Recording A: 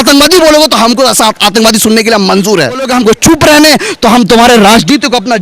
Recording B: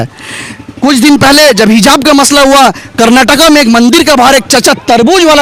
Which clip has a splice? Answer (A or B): A